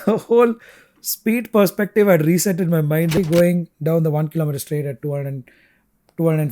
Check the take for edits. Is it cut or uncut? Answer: cut